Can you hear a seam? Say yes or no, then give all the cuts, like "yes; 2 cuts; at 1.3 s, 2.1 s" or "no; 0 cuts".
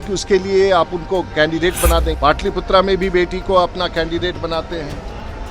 yes; 1 cut; at 2.1 s